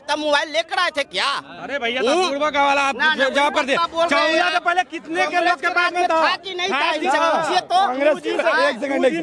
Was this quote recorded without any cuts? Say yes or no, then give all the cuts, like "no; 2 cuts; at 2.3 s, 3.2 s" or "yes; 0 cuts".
yes; 0 cuts